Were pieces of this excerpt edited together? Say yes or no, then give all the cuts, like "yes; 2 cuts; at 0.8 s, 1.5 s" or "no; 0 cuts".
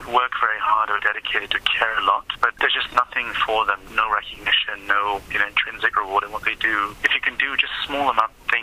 yes; 4 cuts; at 2.5 s, 3.8 s, 5.3 s, 7.0 s